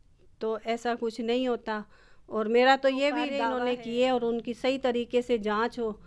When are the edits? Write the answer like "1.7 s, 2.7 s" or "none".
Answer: 3.4 s